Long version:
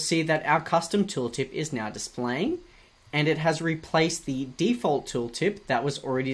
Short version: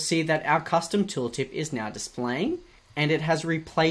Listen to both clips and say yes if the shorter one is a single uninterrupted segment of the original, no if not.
no